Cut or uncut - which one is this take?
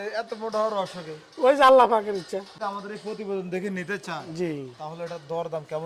cut